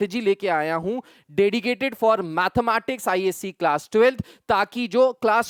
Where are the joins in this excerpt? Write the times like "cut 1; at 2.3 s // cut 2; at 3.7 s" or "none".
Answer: none